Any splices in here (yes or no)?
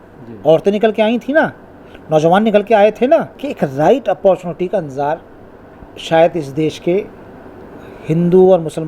yes